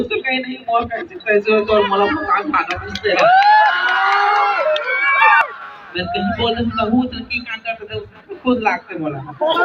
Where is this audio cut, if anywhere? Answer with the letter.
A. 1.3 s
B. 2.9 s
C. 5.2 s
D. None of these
C